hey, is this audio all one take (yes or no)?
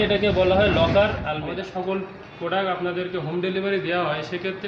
no